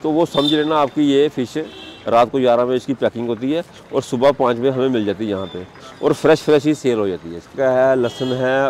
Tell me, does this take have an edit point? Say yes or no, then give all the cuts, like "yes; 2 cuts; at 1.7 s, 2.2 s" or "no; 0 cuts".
yes; 2 cuts; at 1.9 s, 7.5 s